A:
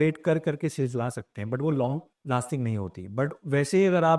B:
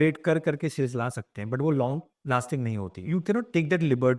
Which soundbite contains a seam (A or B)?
B